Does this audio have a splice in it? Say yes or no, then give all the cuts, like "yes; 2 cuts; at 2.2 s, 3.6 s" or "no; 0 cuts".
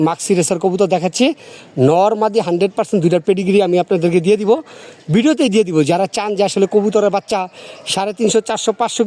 no; 0 cuts